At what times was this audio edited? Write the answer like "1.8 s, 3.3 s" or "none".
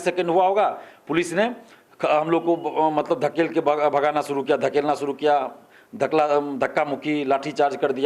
none